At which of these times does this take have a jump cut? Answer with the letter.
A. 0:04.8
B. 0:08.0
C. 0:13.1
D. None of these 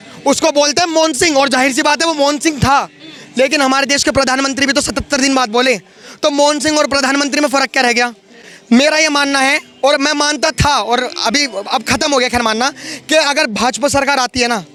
D